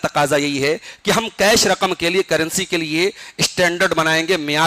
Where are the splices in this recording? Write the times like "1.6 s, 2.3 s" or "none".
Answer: none